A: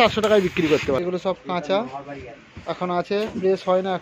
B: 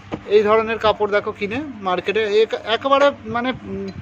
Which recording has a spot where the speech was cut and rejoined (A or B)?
A